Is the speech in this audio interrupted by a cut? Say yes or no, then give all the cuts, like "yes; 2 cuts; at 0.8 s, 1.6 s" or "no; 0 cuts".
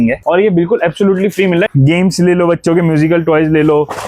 yes; 1 cut; at 1.7 s